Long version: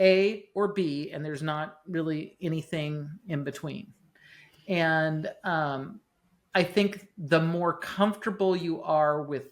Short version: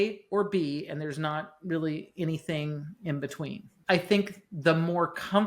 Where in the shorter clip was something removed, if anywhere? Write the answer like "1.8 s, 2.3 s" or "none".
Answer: 3.7 s